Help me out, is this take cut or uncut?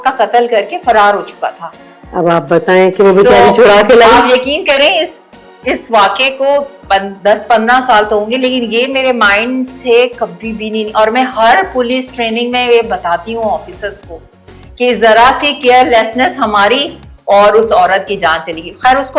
uncut